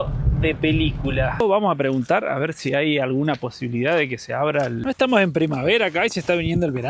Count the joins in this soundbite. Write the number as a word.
two